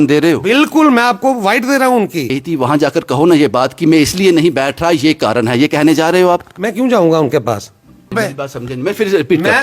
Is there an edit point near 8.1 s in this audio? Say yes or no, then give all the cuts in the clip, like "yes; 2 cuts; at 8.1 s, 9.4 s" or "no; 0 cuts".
yes; 2 cuts; at 2.3 s, 8.1 s